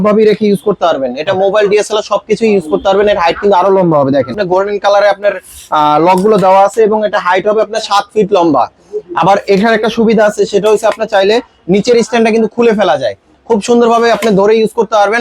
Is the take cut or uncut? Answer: cut